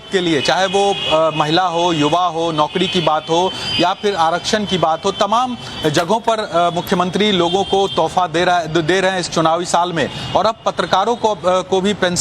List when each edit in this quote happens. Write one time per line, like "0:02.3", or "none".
0:10.8